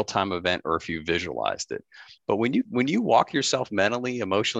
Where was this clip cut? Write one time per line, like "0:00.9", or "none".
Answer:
0:02.1

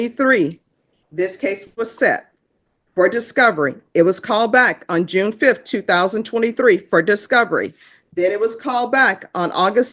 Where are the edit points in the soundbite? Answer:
none

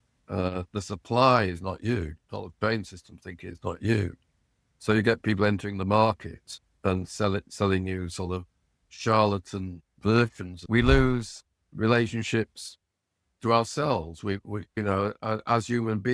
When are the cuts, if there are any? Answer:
0:10.7
0:14.7

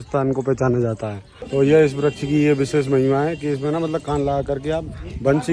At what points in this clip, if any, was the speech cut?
0:01.3

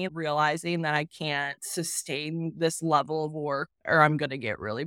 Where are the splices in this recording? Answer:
0:01.6

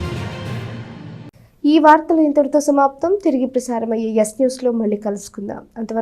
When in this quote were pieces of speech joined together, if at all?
none

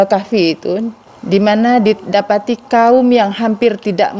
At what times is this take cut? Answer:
0:01.0

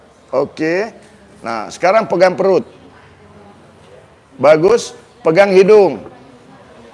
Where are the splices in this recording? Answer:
none

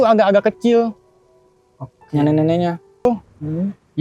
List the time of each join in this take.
0:03.1

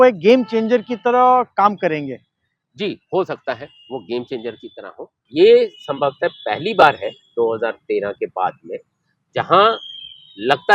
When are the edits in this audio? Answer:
0:05.2

